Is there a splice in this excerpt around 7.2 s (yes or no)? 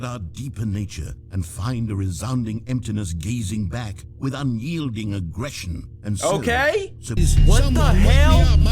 yes